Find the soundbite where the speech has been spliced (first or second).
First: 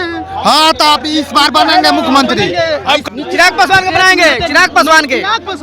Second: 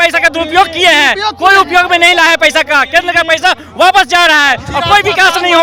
first